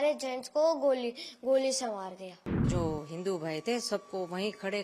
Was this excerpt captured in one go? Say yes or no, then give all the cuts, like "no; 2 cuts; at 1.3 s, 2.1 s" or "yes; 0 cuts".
no; 1 cut; at 2.7 s